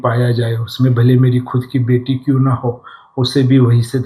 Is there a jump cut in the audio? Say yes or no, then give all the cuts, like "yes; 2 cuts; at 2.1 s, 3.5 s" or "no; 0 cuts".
no; 0 cuts